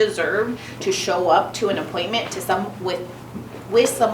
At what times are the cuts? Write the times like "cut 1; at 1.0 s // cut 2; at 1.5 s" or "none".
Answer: none